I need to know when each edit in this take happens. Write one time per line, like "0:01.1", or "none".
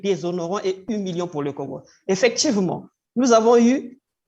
none